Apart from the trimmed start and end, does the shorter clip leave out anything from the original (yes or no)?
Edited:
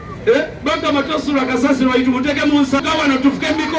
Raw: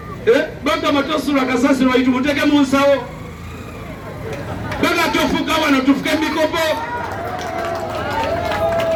yes